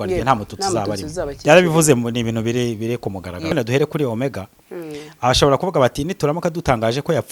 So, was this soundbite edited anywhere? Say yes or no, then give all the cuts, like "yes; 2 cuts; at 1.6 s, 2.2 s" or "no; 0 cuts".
yes; 1 cut; at 3.5 s